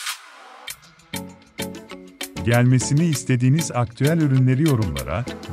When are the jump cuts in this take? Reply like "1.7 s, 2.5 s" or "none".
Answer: 2.4 s